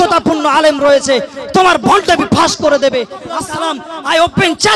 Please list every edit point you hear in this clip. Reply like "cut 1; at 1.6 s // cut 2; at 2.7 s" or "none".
cut 1; at 3.4 s

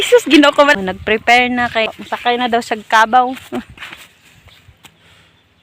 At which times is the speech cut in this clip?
cut 1; at 0.8 s // cut 2; at 2.4 s

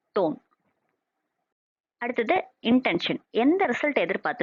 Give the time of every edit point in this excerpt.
none

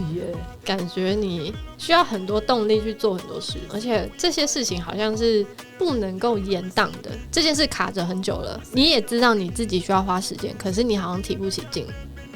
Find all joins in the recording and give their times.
cut 1; at 3.6 s

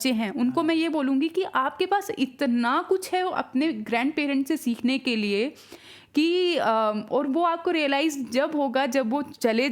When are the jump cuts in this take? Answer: none

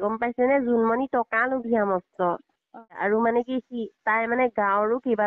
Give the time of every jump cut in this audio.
cut 1; at 3.0 s

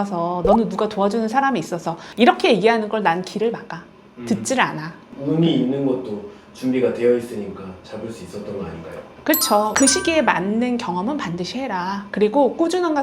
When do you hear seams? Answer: cut 1; at 9.7 s

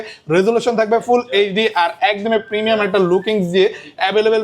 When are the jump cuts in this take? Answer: none

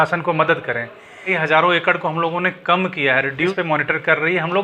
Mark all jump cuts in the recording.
cut 1; at 1.3 s // cut 2; at 3.5 s

